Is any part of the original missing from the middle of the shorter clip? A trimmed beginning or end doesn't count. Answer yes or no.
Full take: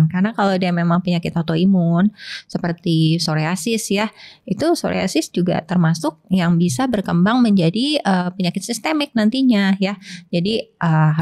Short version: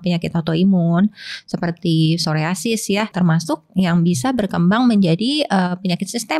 yes